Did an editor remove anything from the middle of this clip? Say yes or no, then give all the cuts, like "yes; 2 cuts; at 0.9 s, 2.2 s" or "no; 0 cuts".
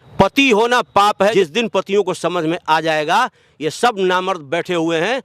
yes; 1 cut; at 1.3 s